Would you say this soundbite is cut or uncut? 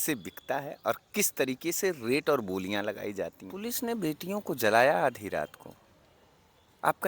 cut